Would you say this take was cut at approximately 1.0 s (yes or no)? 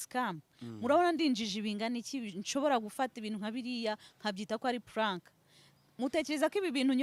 no